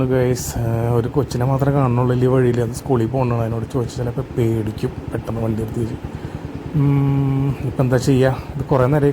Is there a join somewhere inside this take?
no; 0 cuts

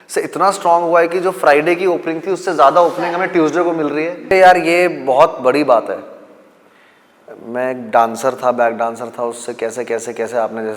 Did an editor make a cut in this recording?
yes; 1 cut; at 4.3 s

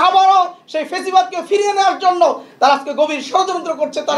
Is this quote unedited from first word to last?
yes; 0 cuts

